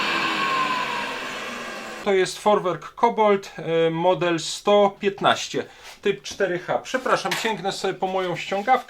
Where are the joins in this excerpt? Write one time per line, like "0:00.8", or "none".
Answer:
0:02.0